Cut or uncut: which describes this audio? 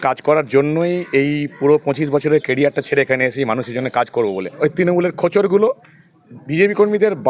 cut